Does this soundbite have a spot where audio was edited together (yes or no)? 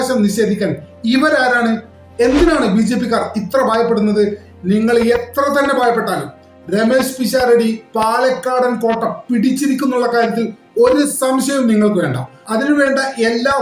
yes